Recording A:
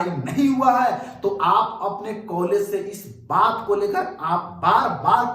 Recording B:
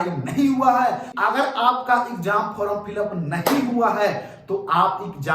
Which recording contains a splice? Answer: B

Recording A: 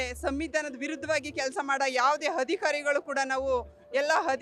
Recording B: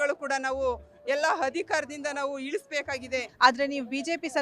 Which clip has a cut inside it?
B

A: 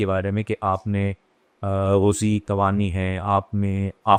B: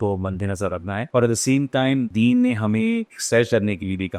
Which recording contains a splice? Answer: B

